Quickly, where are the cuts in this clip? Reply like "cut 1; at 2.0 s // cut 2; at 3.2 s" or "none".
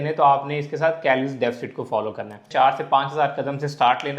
cut 1; at 2.4 s